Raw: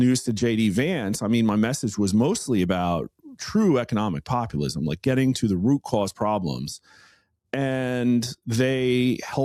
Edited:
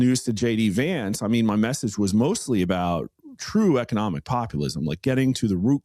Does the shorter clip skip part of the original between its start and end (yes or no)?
no